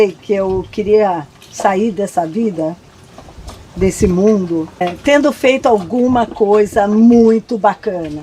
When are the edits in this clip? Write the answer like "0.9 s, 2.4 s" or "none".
4.8 s